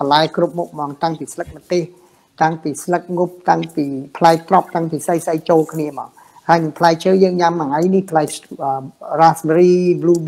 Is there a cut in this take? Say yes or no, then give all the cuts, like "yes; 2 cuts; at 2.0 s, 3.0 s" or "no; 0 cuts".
no; 0 cuts